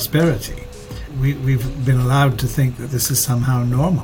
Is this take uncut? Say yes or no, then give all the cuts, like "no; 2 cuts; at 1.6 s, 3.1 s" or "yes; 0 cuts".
no; 1 cut; at 1.0 s